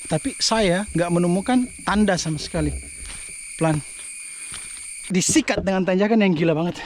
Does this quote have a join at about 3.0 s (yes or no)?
no